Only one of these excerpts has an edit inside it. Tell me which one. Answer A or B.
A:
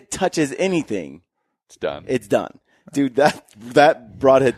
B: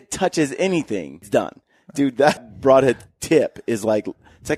B